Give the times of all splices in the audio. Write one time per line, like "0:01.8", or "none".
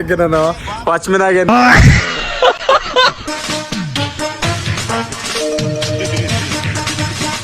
0:01.5
0:03.2